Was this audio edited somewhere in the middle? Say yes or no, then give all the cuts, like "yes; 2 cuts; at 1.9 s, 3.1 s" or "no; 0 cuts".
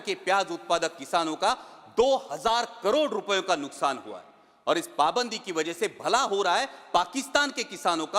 no; 0 cuts